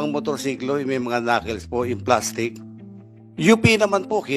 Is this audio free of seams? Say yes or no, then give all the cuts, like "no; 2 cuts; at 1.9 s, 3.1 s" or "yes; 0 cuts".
yes; 0 cuts